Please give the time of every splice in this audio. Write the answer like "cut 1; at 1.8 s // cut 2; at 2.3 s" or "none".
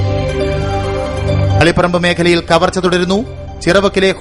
cut 1; at 1.6 s